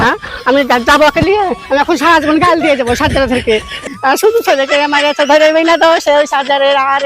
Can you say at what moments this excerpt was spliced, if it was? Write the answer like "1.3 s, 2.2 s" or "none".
3.8 s